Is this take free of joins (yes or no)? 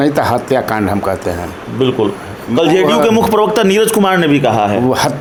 yes